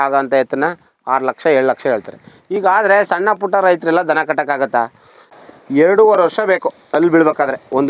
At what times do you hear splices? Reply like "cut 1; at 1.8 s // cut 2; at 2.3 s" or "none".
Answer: cut 1; at 5.4 s